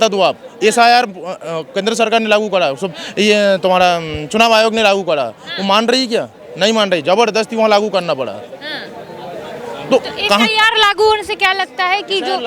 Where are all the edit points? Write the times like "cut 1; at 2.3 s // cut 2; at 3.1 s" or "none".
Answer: none